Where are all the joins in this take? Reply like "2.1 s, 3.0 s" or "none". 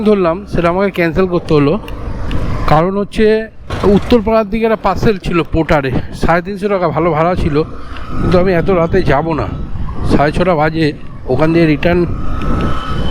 3.6 s